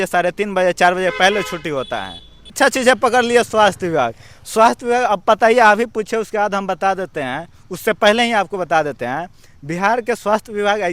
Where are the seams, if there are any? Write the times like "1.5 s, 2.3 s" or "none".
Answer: 2.5 s